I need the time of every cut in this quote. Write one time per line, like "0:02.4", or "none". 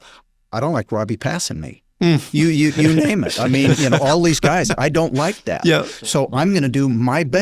none